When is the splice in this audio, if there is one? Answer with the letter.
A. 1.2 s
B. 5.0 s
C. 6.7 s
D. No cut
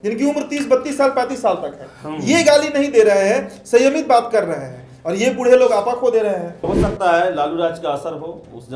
C